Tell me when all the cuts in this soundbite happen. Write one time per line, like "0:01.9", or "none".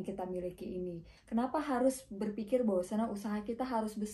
0:01.1